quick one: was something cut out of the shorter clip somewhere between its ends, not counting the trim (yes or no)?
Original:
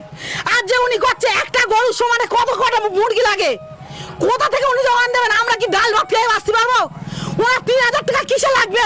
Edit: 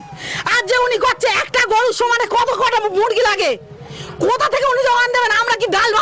no